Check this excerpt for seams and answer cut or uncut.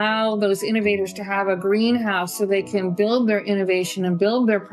uncut